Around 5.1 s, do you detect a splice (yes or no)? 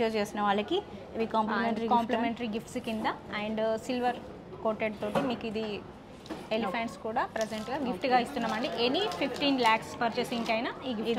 no